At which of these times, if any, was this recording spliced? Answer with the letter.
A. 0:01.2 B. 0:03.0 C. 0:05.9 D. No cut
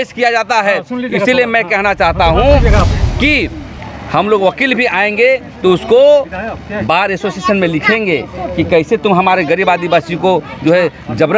B